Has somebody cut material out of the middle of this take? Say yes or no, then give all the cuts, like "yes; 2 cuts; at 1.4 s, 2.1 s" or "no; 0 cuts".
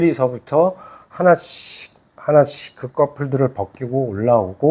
no; 0 cuts